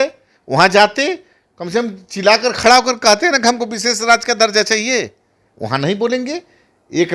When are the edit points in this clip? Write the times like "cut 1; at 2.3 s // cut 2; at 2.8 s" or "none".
none

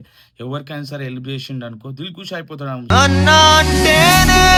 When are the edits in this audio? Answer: none

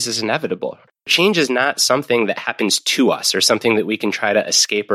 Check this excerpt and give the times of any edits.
cut 1; at 1.1 s

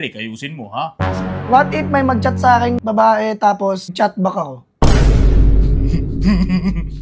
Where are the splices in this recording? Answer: cut 1; at 2.8 s // cut 2; at 3.9 s

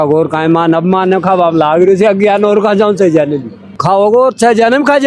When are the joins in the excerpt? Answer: cut 1; at 3.7 s

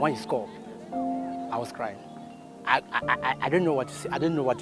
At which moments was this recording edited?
cut 1; at 2.4 s

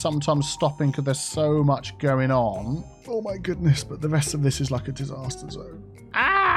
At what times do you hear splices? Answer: cut 1; at 2.9 s

